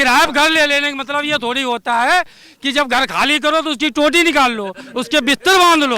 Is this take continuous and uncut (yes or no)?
yes